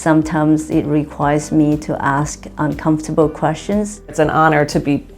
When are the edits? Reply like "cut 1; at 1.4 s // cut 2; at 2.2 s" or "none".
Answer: cut 1; at 4.1 s